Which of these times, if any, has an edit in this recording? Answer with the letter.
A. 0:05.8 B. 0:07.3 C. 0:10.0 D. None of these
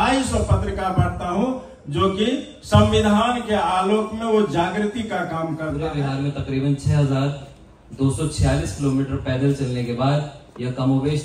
A